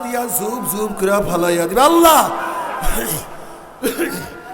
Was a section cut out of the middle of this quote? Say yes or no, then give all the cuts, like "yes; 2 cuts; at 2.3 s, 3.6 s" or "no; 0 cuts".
no; 0 cuts